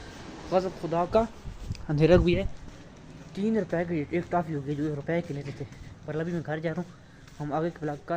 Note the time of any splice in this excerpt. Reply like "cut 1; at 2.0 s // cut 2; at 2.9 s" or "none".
none